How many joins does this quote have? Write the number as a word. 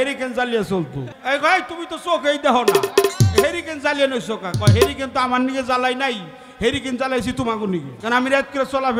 two